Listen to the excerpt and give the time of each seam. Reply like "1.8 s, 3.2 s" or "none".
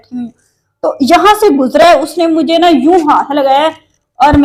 none